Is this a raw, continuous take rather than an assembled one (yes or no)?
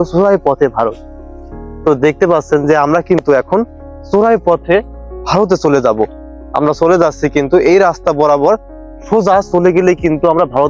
yes